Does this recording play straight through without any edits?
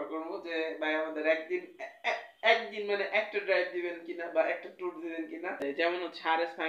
no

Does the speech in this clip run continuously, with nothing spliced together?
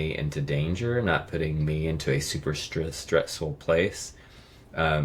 yes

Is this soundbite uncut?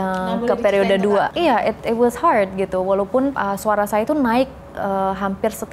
no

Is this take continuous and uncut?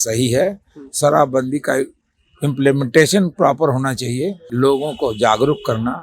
no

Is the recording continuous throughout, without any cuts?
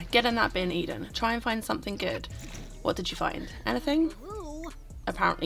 yes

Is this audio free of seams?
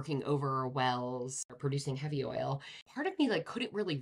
no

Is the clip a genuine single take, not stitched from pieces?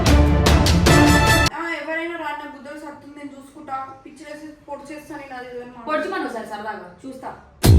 no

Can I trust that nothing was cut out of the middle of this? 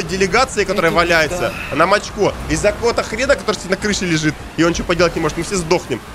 yes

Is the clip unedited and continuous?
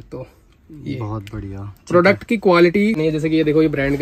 no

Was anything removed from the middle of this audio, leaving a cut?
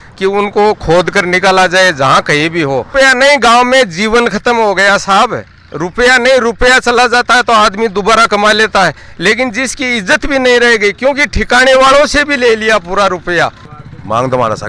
yes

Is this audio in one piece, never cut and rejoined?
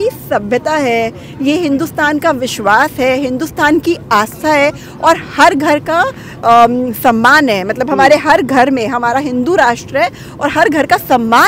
yes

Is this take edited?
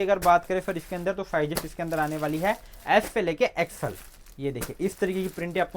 no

